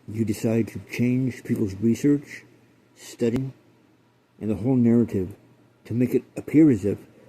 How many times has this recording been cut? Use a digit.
1